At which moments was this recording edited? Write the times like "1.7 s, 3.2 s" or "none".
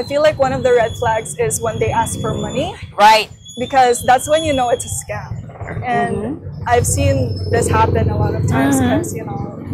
none